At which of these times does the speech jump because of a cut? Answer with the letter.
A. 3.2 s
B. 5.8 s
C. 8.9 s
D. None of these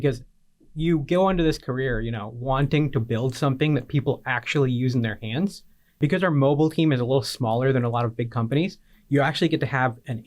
B